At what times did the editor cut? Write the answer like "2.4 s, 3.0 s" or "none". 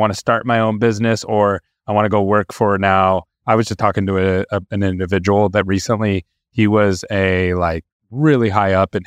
none